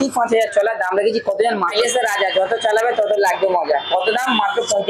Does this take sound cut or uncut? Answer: cut